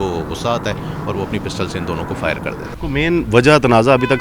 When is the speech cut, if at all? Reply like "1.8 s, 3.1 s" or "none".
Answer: 2.7 s